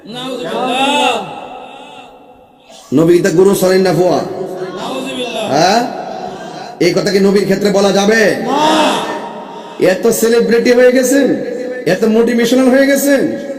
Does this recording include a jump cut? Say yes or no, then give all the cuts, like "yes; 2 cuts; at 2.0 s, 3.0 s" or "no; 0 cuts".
no; 0 cuts